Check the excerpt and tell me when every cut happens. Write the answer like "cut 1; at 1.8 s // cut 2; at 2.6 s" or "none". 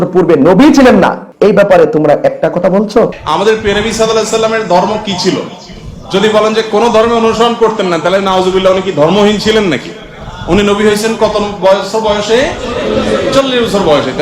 cut 1; at 1.2 s // cut 2; at 3.2 s